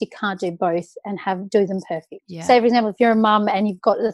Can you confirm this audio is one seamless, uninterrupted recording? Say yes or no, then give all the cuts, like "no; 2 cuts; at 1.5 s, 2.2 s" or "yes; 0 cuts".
yes; 0 cuts